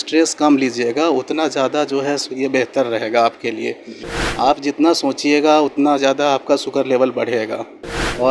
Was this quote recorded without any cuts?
no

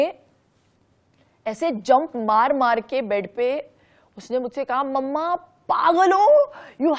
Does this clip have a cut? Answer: no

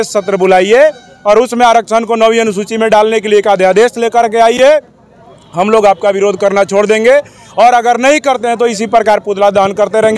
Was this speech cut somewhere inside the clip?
no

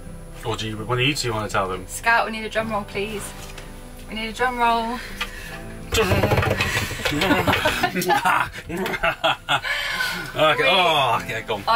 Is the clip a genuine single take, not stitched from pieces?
yes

